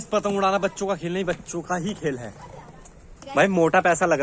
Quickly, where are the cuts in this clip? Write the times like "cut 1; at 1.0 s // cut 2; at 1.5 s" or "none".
cut 1; at 3.2 s